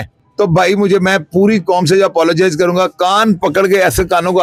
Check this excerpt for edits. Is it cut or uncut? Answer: uncut